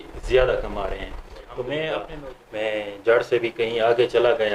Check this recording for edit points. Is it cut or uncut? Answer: cut